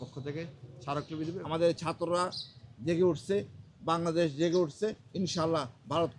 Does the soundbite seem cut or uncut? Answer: cut